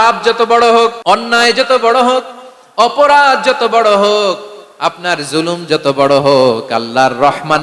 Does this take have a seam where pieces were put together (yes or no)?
yes